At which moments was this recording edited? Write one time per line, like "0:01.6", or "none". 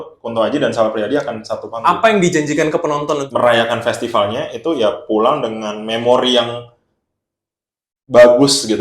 0:03.2